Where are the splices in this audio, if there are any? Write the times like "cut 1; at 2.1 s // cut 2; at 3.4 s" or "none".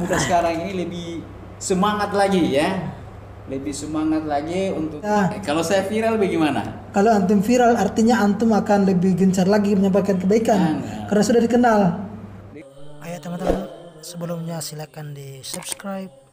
cut 1; at 5.1 s // cut 2; at 12.5 s